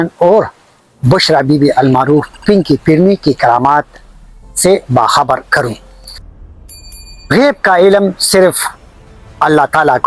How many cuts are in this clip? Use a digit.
1